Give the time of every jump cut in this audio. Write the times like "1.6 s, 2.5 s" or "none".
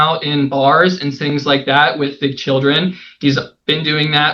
none